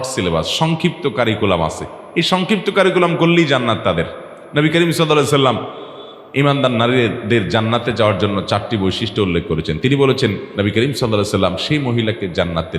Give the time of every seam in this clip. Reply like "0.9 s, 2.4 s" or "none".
10.5 s

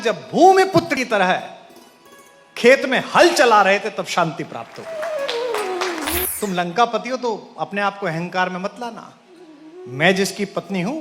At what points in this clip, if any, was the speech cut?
0.9 s, 6.2 s

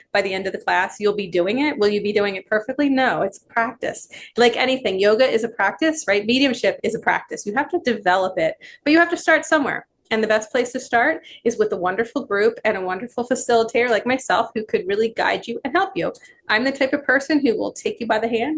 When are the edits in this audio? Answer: none

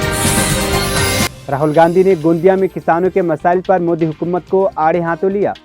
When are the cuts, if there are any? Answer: 1.3 s

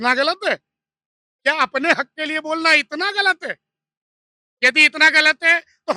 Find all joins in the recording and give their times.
none

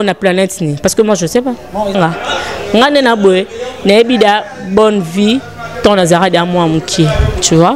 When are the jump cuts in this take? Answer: 1.9 s

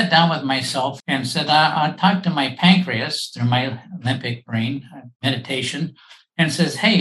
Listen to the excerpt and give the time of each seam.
1.0 s, 5.0 s

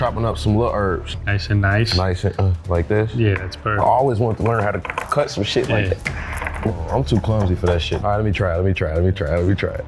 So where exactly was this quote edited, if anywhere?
1.1 s, 6.7 s, 8.0 s

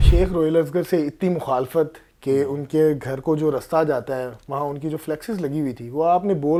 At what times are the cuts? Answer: none

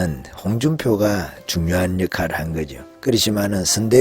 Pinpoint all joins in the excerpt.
2.8 s

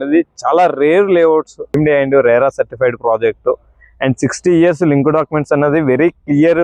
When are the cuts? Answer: 1.6 s

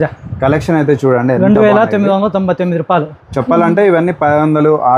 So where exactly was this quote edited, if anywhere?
3.2 s

